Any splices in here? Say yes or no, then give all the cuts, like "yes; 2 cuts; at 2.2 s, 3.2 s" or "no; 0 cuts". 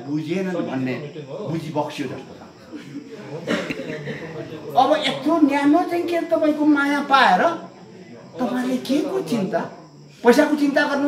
no; 0 cuts